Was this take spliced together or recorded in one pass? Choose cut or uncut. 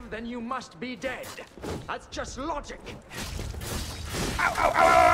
cut